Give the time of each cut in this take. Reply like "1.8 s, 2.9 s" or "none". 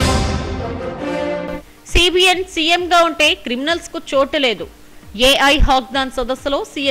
1.4 s